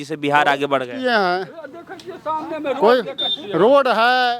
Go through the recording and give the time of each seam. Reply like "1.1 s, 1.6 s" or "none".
none